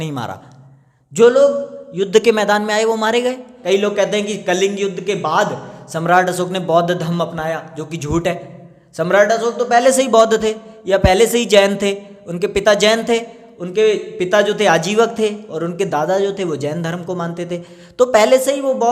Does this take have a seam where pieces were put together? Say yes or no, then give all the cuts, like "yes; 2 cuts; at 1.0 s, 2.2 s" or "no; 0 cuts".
yes; 1 cut; at 3.6 s